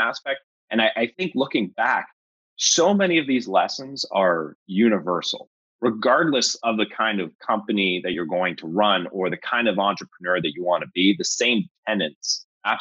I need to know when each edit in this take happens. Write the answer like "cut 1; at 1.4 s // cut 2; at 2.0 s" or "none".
none